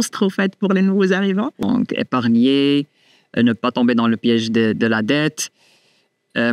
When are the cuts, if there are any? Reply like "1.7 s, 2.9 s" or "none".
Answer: 1.6 s